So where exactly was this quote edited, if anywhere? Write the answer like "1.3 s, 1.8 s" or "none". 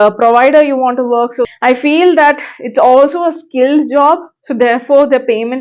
1.4 s